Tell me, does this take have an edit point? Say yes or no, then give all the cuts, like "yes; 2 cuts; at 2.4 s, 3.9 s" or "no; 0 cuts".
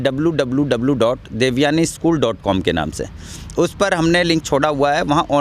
no; 0 cuts